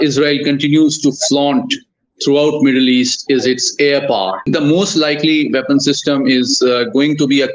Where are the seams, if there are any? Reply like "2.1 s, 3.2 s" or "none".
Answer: 4.5 s